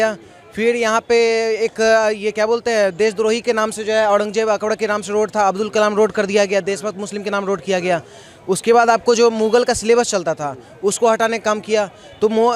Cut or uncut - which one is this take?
uncut